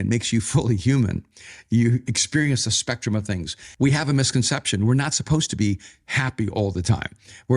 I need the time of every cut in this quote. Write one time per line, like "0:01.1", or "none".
0:03.6